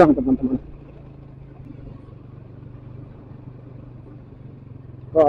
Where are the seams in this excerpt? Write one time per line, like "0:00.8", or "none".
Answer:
0:01.6